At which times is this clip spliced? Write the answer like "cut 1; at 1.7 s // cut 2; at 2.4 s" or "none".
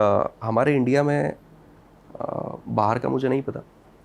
none